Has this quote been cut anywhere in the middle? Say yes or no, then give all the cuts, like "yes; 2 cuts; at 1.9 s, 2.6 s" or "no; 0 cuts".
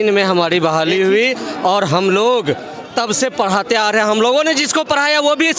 no; 0 cuts